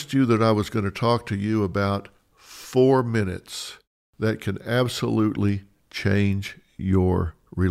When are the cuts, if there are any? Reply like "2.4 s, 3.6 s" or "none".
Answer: none